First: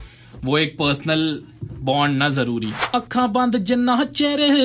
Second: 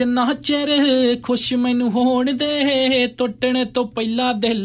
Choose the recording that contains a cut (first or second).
first